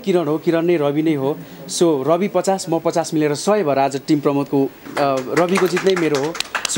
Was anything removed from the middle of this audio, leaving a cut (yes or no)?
yes